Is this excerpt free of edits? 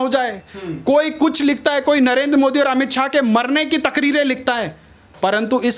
yes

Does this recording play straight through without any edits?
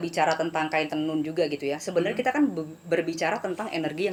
yes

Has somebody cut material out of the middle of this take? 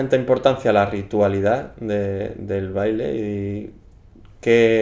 no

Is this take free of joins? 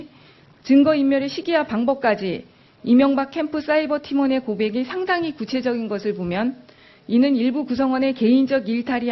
no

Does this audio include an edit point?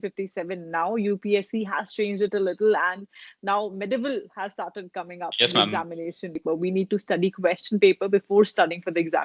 yes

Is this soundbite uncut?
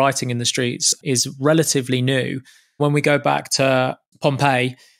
no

